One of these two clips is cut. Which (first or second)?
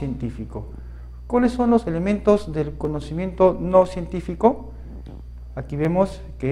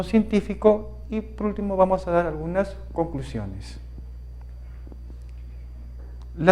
second